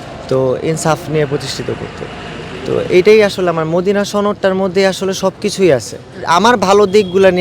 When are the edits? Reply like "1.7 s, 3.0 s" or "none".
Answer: 6.2 s